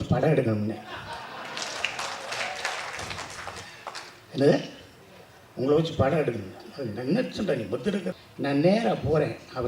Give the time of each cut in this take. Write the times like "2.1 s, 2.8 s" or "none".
8.2 s